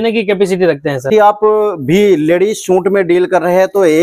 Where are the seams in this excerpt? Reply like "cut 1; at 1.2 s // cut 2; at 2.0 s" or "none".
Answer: cut 1; at 1.1 s

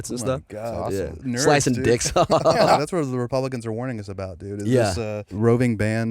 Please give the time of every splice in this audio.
cut 1; at 2.8 s // cut 2; at 5.2 s

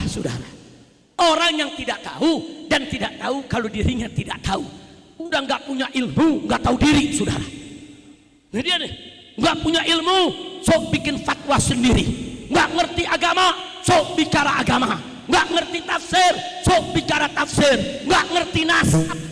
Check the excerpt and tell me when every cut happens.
cut 1; at 0.9 s

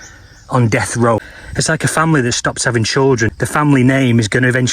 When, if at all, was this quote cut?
cut 1; at 1.4 s // cut 2; at 3.4 s

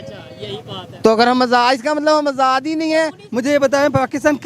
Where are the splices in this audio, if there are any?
cut 1; at 3.2 s

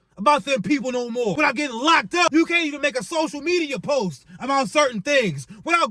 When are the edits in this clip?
cut 1; at 1.3 s // cut 2; at 2.3 s

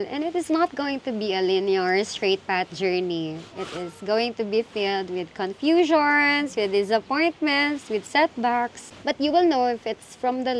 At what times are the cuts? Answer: cut 1; at 8.9 s

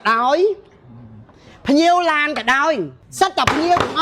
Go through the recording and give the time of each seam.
cut 1; at 3.0 s

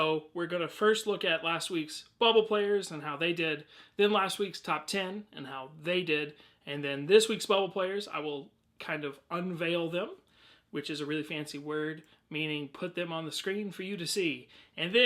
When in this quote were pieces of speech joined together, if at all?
cut 1; at 7.4 s

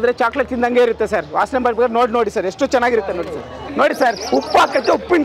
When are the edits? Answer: cut 1; at 3.7 s

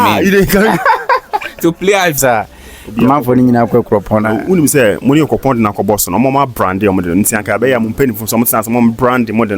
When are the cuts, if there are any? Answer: cut 1; at 2.2 s

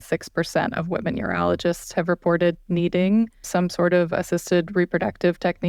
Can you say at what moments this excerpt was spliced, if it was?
none

